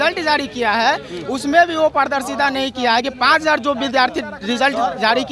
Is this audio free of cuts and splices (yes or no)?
yes